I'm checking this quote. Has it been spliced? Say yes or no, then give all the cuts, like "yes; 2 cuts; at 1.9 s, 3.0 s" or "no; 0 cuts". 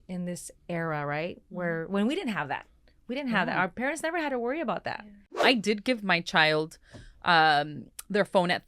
yes; 1 cut; at 5.4 s